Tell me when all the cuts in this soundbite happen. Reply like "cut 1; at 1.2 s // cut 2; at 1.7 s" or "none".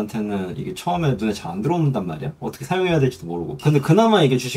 cut 1; at 3.6 s